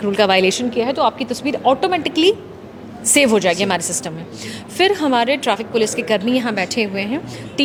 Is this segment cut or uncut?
uncut